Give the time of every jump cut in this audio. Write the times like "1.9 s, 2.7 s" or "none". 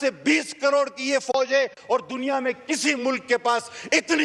none